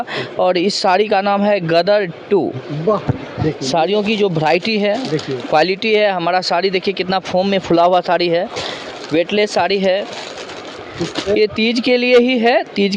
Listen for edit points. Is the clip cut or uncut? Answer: cut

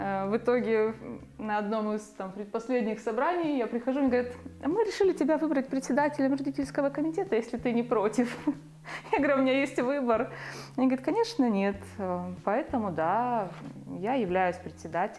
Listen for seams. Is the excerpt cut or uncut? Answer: uncut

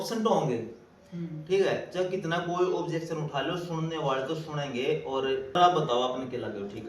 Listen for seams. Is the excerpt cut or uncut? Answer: cut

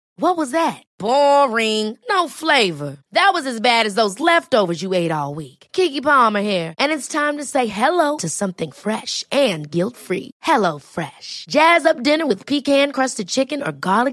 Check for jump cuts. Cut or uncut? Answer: uncut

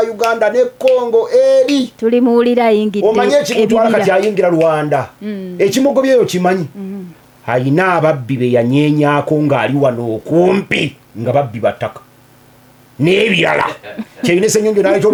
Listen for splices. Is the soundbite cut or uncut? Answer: uncut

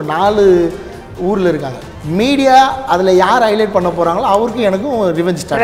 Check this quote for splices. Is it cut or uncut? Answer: cut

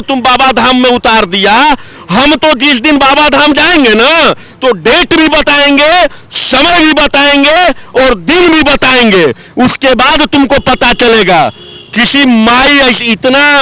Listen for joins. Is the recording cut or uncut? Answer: uncut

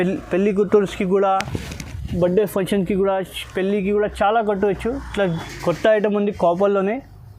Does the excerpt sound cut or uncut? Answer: cut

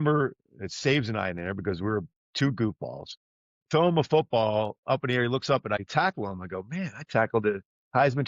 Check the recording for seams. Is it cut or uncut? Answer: cut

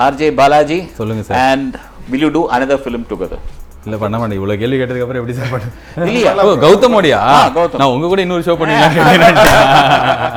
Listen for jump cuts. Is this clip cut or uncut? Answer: uncut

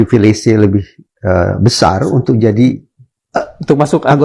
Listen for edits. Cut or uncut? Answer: uncut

